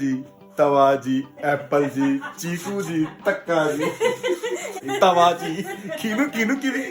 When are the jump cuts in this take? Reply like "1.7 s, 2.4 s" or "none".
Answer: 4.8 s